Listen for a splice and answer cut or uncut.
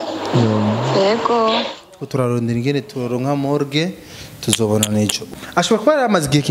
cut